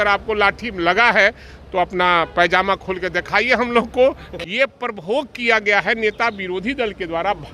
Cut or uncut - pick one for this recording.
cut